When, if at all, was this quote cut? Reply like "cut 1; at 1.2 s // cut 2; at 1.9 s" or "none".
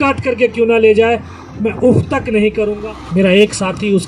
cut 1; at 2.7 s